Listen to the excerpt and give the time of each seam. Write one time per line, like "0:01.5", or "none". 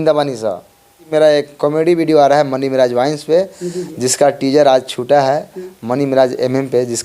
0:01.1